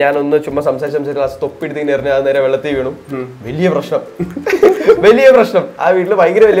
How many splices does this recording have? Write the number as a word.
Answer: zero